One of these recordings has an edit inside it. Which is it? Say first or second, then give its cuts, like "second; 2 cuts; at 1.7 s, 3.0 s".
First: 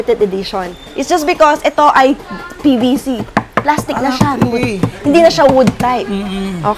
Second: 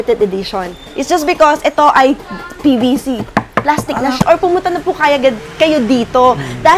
second; 1 cut; at 4.2 s